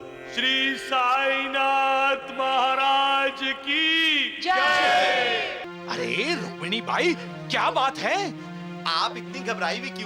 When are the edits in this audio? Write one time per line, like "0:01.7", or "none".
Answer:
0:05.6